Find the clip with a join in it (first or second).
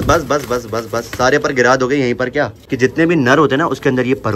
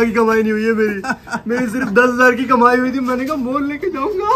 first